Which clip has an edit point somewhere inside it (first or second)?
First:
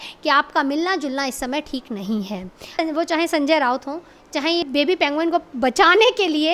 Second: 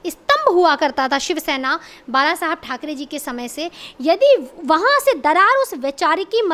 first